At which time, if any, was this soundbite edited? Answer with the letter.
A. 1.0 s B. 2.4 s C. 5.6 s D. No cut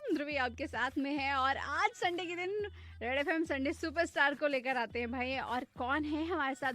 B